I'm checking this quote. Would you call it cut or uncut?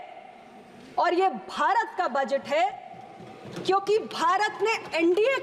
uncut